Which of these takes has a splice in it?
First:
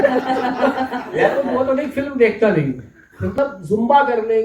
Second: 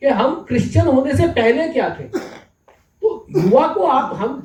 first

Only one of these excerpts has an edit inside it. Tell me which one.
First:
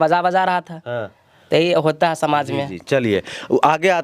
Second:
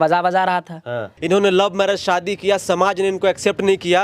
second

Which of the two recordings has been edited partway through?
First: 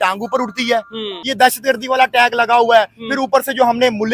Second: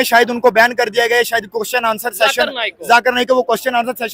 first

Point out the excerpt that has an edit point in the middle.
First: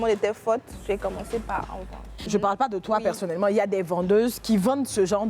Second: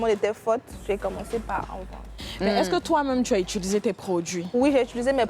first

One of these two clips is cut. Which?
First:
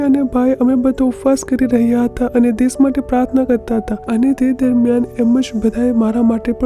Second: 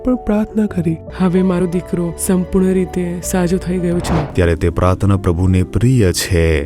second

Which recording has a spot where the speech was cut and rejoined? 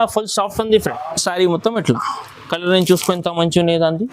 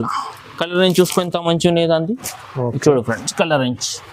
first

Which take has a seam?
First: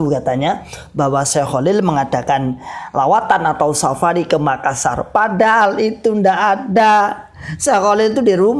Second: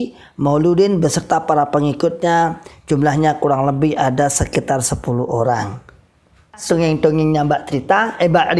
second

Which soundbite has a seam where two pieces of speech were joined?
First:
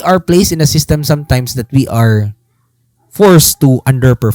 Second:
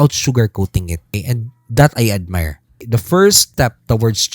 second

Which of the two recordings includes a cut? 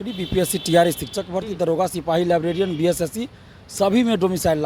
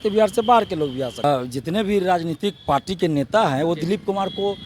second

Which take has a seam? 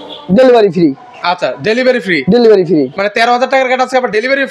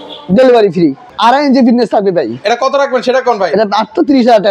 second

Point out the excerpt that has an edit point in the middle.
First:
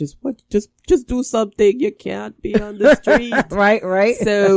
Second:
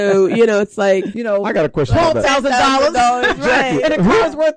second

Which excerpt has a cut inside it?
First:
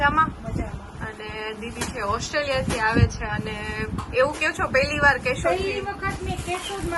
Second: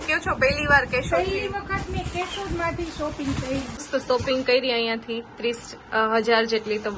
second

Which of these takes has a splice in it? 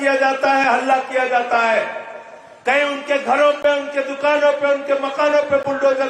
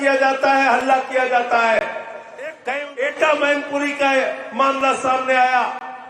second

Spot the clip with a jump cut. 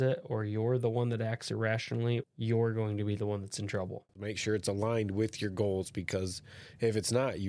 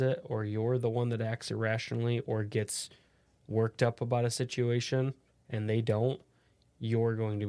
first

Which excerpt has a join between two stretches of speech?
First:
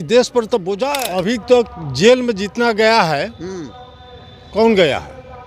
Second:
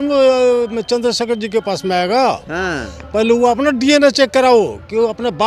first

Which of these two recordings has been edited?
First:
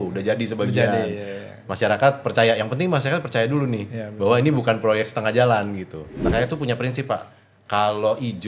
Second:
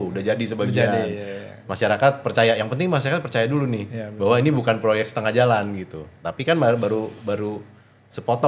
first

